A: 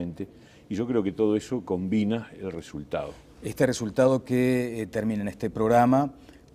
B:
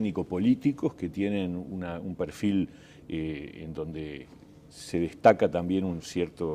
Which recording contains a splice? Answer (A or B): B